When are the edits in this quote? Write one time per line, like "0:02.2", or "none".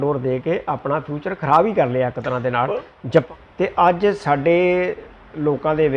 0:03.2